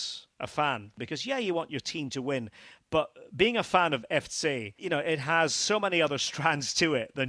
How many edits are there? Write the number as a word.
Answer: two